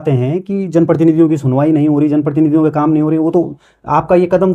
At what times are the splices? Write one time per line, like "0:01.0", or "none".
none